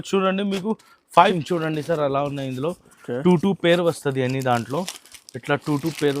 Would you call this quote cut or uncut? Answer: cut